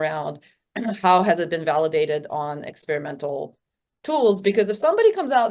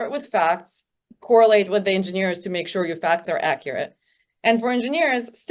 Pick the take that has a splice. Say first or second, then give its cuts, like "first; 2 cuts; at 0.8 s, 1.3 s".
second; 1 cut; at 1.2 s